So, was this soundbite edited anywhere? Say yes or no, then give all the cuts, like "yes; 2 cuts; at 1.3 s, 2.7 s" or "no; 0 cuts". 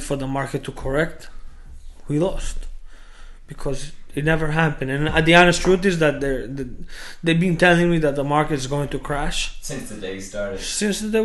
no; 0 cuts